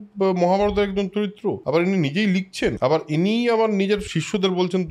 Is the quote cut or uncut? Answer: cut